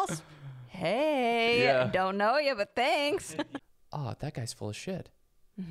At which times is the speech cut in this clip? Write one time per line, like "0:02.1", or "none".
0:03.2

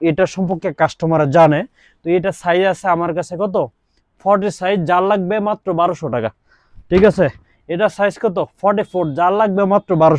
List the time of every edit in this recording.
none

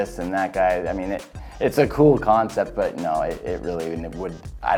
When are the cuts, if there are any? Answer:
none

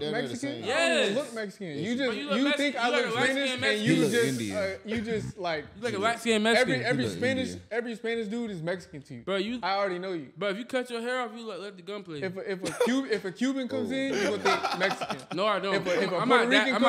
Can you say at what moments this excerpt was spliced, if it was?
none

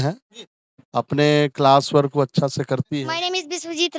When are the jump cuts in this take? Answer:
0:03.0

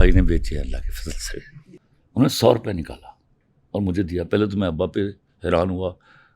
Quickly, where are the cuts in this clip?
0:01.7

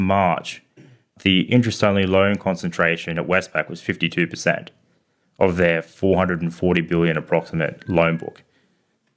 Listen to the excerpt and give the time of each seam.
0:01.1

